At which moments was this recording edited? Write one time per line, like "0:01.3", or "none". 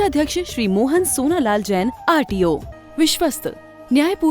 0:02.7